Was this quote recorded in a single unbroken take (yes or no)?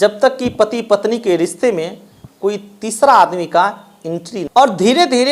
no